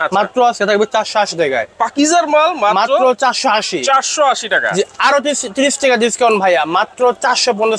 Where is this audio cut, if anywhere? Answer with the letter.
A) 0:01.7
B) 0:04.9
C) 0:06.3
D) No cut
D